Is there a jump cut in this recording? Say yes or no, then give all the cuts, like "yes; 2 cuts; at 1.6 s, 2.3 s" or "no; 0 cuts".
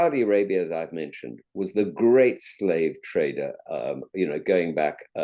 no; 0 cuts